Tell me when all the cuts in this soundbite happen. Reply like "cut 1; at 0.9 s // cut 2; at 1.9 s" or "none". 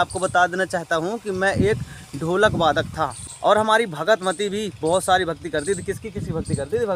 cut 1; at 3.3 s